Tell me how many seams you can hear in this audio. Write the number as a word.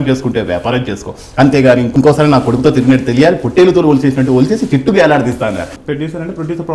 one